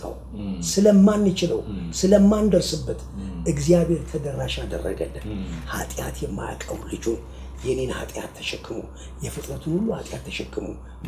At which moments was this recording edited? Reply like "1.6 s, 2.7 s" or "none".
none